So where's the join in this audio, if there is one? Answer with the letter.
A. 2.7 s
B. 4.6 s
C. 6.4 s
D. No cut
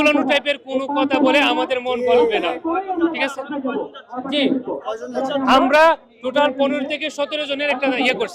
D